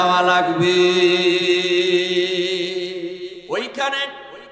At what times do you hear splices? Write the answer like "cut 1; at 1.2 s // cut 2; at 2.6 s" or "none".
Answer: cut 1; at 3.4 s